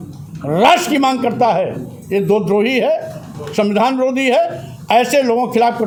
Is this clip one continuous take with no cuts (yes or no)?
yes